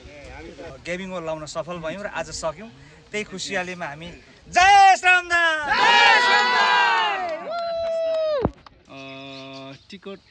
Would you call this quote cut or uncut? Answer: cut